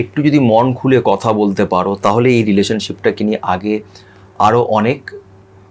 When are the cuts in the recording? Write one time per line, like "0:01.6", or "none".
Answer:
none